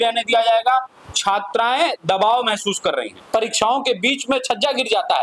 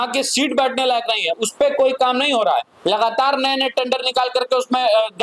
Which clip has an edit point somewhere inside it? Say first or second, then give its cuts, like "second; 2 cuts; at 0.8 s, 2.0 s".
first; 1 cut; at 3.2 s